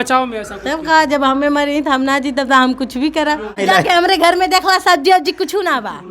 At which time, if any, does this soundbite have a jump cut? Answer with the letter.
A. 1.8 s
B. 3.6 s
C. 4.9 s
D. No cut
B